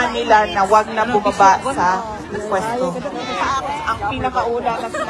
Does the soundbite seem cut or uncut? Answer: cut